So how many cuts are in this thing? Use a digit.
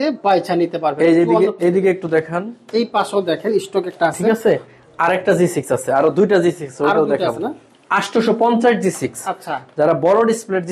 0